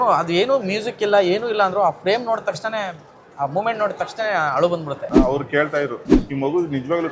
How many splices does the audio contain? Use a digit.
1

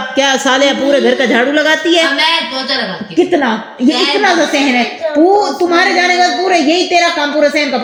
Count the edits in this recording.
0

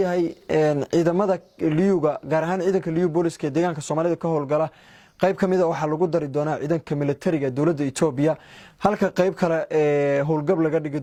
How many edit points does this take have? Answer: 0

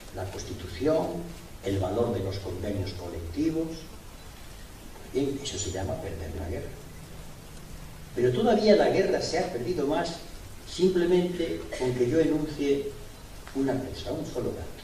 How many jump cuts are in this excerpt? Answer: 1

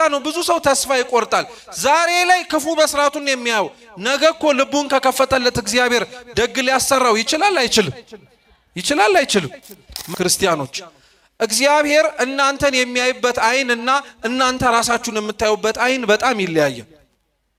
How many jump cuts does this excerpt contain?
1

